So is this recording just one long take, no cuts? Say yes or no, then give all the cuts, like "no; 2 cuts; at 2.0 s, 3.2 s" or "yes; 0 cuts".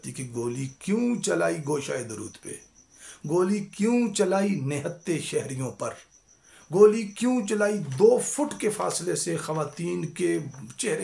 yes; 0 cuts